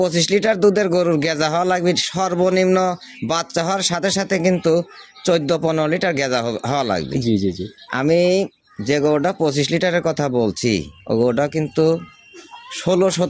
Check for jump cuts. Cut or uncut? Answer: uncut